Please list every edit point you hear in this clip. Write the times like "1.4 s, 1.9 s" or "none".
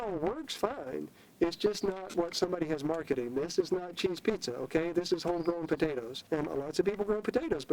6.1 s